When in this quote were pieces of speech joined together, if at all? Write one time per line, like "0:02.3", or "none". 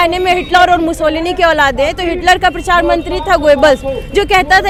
none